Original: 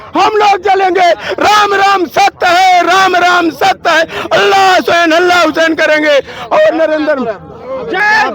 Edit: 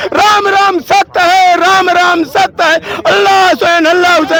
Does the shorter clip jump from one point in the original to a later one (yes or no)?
no